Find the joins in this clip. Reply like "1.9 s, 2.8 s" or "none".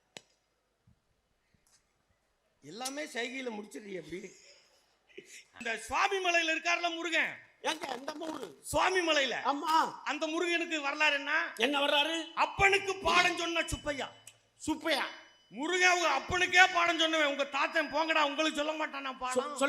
5.6 s